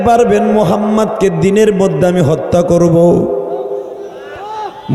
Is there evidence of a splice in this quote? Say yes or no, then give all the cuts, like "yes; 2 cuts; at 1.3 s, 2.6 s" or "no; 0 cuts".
no; 0 cuts